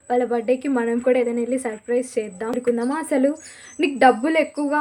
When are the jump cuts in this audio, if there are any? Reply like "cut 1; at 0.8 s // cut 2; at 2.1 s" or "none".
cut 1; at 2.6 s